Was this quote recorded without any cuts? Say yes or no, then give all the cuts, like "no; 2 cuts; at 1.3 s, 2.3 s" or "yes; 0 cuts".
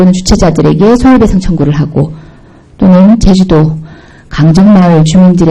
yes; 0 cuts